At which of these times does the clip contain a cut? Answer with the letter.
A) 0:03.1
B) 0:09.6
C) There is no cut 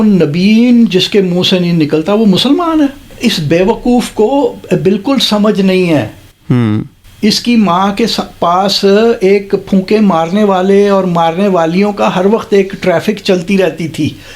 A